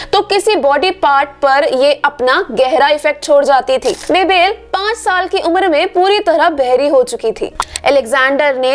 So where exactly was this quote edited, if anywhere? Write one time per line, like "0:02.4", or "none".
0:04.0
0:07.6